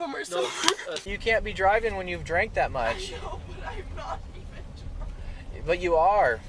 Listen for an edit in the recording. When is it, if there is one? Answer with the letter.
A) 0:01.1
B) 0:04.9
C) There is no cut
A